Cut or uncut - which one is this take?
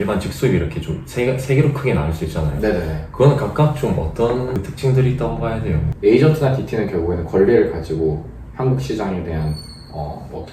cut